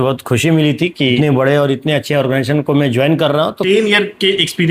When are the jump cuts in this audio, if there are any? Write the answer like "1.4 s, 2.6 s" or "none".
1.2 s, 3.6 s